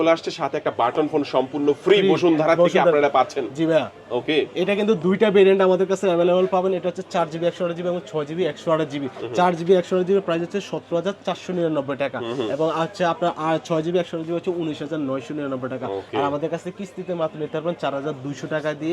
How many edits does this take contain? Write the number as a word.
zero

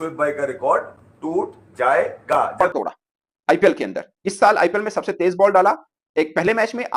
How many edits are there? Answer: one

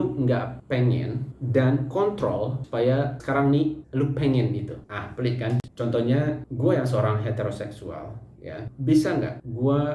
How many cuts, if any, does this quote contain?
one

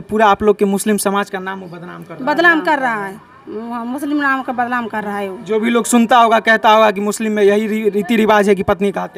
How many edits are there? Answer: zero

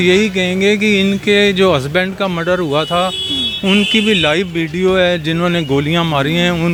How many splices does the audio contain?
zero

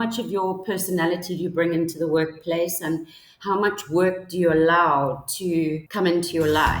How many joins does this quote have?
one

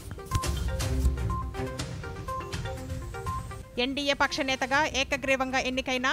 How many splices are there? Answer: zero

